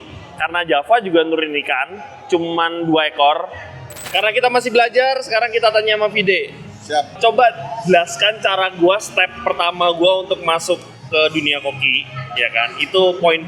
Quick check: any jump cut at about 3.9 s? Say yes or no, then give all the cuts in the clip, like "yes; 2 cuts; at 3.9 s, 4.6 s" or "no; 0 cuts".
yes; 1 cut; at 3.9 s